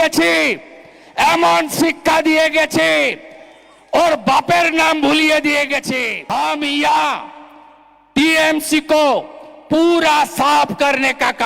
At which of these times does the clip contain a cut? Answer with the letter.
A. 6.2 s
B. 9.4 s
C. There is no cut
A